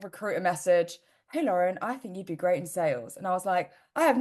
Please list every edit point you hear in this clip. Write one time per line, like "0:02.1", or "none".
none